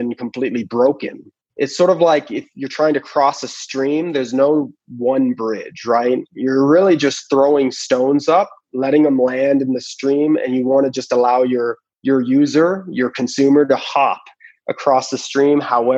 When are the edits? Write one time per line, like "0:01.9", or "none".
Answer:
0:01.5